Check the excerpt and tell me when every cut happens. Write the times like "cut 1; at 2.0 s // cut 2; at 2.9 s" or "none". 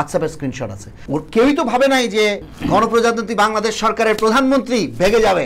cut 1; at 0.9 s // cut 2; at 2.5 s